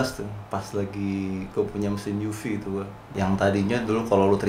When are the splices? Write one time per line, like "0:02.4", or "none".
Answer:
0:03.1